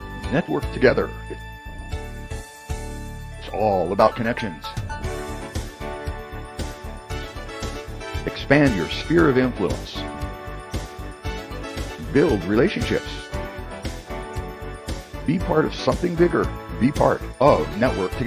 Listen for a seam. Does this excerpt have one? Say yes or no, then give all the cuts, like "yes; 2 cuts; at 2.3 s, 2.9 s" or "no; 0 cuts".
no; 0 cuts